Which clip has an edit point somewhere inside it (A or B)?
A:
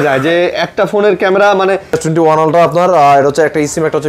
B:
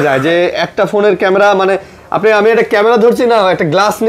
A